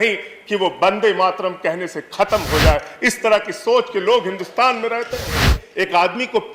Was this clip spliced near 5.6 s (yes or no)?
yes